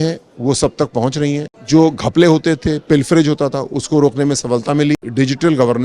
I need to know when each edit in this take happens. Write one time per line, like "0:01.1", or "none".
0:01.5
0:04.9